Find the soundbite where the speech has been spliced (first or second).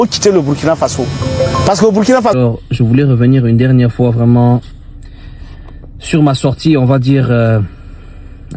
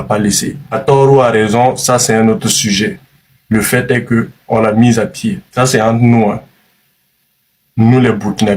first